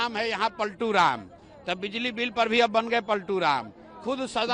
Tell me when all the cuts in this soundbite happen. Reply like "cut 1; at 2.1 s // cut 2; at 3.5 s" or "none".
none